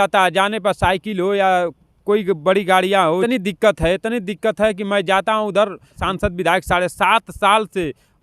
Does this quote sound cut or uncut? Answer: cut